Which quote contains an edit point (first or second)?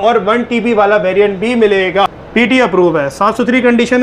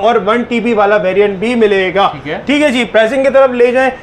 first